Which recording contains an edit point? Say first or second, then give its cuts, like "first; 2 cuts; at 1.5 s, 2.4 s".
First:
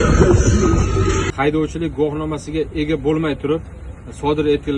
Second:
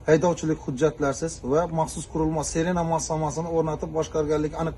first; 1 cut; at 1.3 s